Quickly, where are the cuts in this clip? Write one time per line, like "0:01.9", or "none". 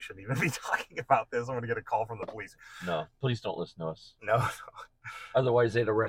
0:02.5

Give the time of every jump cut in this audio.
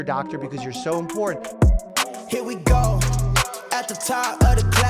0:01.4

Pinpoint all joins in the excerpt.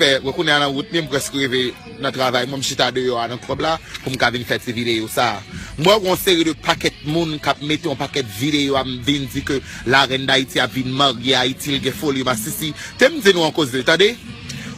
none

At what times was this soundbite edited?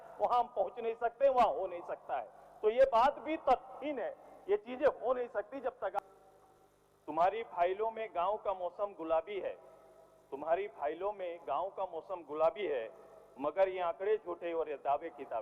0:05.9

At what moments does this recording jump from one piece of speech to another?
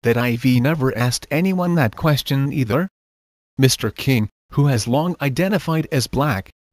0:04.9

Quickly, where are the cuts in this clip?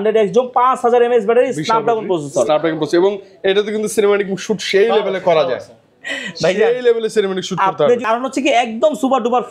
0:08.0

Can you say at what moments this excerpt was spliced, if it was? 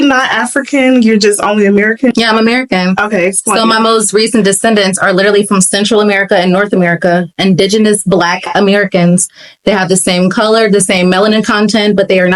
none

